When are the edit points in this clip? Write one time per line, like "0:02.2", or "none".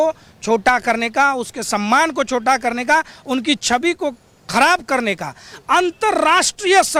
none